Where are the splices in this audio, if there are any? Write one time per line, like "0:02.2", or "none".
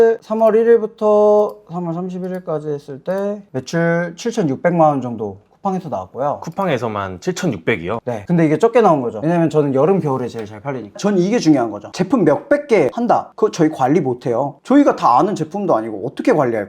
0:08.2
0:10.9
0:12.9